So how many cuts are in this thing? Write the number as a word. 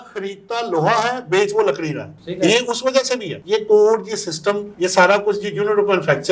zero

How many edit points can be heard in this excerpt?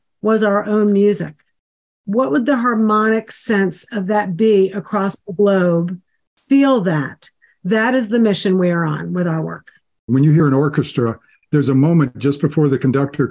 two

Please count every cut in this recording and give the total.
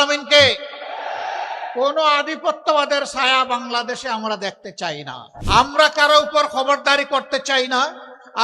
one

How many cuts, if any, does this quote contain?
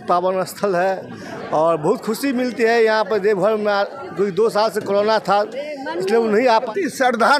one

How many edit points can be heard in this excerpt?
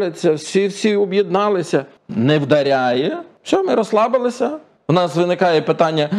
three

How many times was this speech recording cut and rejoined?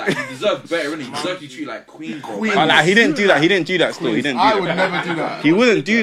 zero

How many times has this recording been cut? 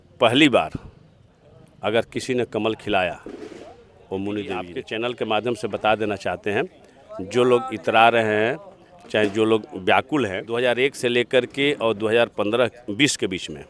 two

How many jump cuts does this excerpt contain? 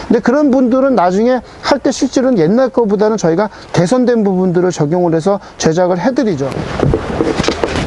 one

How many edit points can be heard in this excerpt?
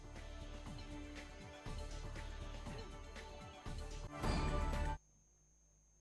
one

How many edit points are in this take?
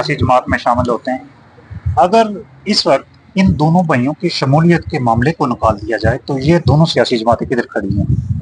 zero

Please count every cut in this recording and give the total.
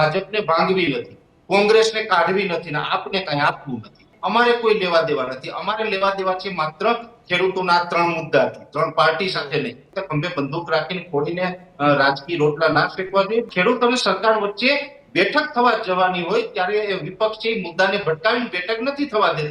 three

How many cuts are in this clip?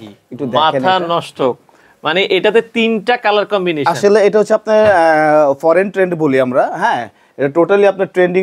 zero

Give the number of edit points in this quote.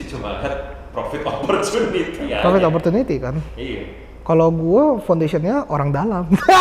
zero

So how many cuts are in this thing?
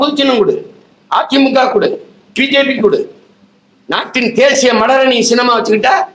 zero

